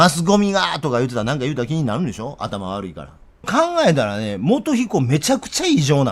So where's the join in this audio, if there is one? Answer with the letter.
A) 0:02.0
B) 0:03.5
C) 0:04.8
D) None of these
B